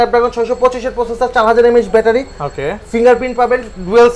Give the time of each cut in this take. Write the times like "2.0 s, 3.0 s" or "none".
none